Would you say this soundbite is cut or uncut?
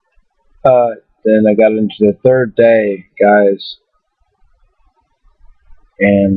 uncut